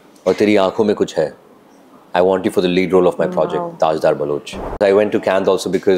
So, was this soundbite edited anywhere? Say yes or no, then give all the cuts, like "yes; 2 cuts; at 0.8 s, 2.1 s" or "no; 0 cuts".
yes; 1 cut; at 4.8 s